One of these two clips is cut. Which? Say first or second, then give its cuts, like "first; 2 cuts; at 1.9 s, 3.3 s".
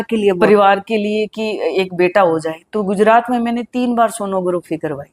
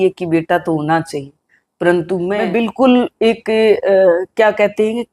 second; 1 cut; at 2.4 s